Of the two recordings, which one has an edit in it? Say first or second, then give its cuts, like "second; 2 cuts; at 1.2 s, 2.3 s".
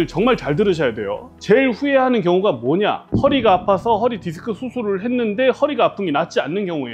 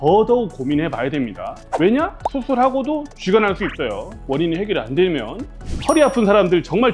second; 1 cut; at 5.6 s